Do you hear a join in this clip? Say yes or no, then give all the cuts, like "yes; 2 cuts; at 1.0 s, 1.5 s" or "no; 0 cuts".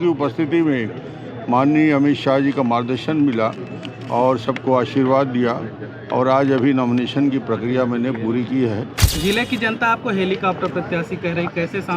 yes; 1 cut; at 9.0 s